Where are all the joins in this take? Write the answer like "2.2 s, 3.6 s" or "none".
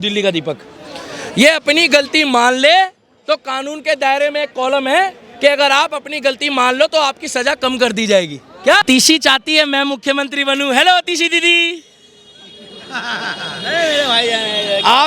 8.8 s